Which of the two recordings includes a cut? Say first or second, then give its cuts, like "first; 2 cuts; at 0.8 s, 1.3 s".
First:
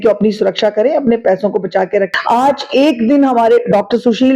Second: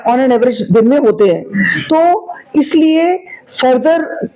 first; 1 cut; at 2.1 s